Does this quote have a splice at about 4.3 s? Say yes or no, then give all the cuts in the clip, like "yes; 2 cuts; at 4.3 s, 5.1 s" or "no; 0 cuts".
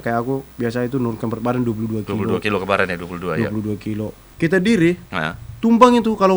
yes; 1 cut; at 4.3 s